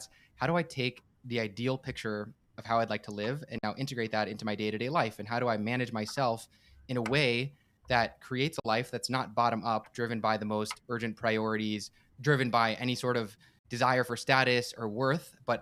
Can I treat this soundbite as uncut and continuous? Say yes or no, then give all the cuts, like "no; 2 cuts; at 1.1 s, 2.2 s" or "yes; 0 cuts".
yes; 0 cuts